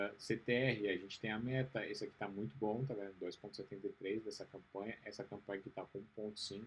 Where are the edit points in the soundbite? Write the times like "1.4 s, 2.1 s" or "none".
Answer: none